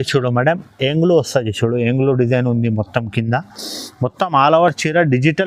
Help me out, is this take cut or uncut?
uncut